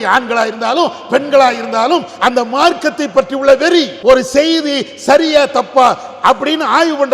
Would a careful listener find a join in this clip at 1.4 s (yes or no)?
no